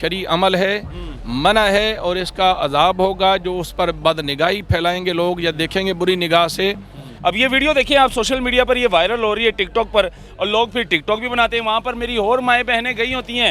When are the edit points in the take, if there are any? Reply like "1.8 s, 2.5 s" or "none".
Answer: 7.0 s